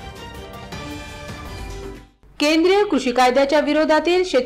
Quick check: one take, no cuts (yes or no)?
no